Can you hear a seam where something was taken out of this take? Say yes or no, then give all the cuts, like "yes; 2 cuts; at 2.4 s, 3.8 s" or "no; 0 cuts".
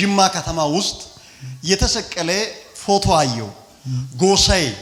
no; 0 cuts